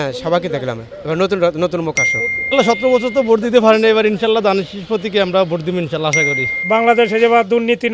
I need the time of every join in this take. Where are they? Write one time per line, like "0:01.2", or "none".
0:06.6